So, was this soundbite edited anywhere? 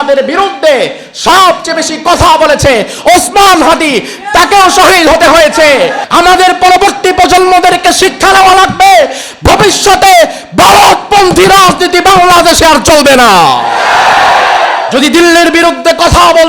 yes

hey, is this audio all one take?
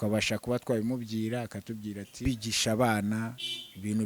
no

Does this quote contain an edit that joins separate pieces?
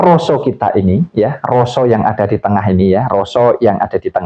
no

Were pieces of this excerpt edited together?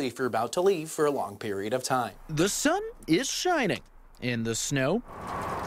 yes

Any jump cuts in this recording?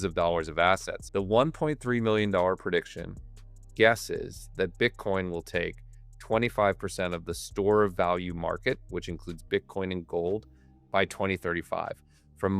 yes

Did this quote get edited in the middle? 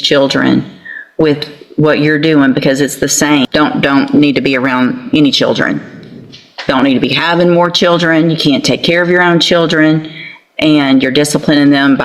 yes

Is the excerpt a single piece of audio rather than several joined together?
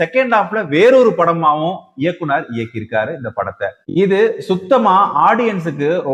yes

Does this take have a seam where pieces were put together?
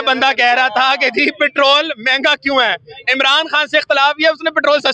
no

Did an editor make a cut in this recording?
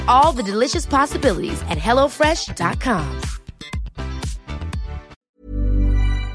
yes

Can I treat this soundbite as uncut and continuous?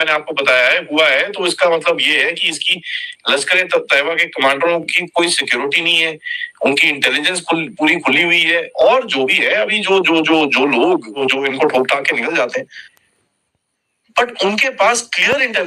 no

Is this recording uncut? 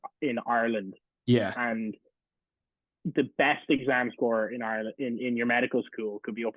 yes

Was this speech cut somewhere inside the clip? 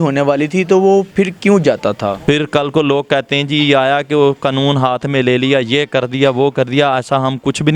yes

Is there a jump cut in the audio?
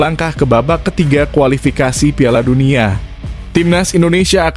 no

